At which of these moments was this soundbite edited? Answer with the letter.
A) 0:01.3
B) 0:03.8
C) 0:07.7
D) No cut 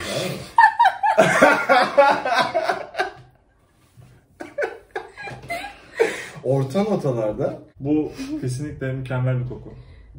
C